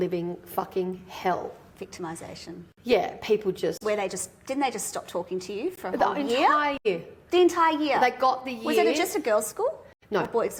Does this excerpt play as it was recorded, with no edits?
yes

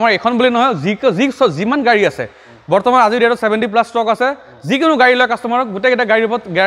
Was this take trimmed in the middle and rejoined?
no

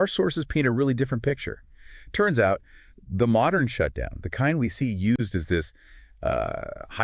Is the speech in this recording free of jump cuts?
yes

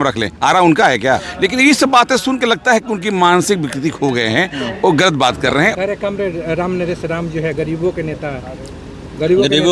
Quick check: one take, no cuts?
no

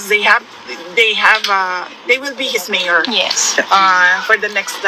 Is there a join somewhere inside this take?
no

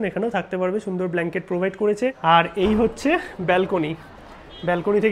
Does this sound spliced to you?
yes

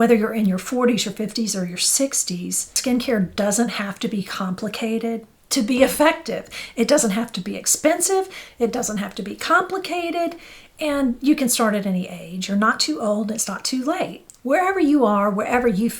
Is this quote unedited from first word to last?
no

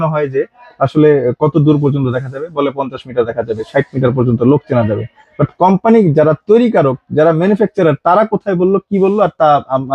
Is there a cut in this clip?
no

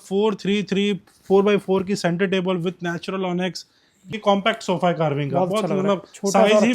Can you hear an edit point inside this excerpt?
yes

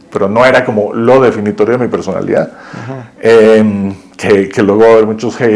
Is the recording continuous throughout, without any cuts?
yes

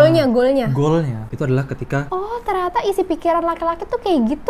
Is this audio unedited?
no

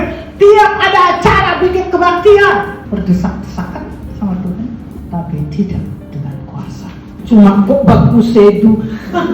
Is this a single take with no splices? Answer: no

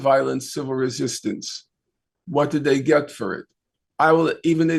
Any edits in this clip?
no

